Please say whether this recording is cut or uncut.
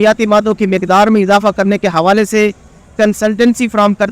uncut